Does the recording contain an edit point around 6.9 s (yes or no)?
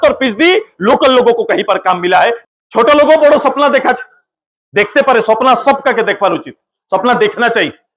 no